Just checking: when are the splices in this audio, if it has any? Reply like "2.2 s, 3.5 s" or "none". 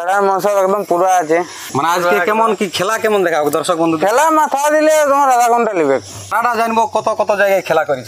1.6 s, 6.2 s